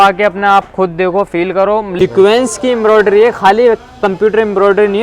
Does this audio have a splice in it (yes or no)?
yes